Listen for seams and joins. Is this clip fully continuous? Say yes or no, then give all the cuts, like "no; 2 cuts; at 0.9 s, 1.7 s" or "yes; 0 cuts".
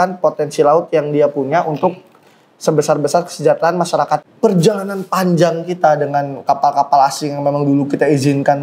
no; 1 cut; at 4.3 s